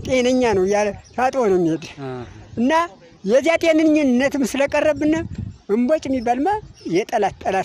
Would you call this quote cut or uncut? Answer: cut